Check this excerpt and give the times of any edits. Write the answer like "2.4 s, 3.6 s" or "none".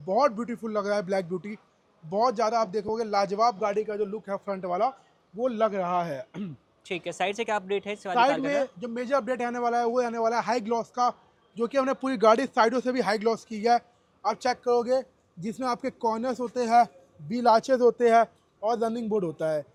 none